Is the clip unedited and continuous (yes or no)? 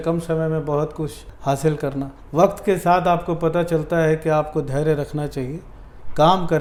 yes